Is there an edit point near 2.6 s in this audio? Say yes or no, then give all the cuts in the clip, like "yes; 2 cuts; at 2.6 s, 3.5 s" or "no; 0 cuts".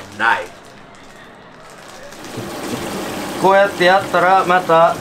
yes; 1 cut; at 2.6 s